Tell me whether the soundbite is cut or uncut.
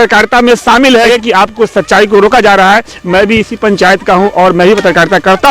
cut